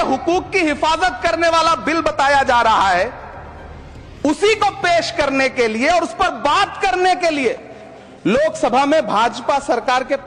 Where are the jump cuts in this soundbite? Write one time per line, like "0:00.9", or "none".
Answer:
none